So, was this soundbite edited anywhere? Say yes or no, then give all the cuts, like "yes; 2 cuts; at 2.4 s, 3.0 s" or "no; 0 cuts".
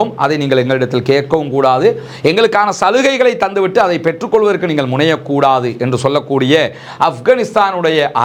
no; 0 cuts